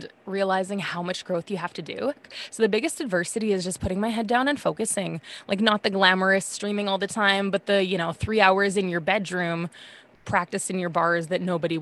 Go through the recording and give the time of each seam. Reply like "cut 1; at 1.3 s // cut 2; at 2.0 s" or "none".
cut 1; at 2.3 s